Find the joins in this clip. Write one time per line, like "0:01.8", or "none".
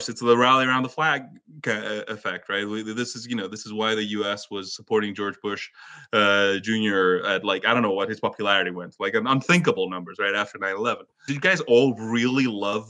0:11.2